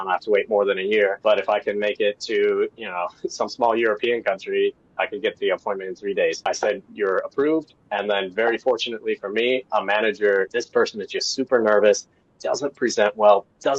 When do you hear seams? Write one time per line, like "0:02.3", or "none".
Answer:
0:01.2
0:06.4
0:10.5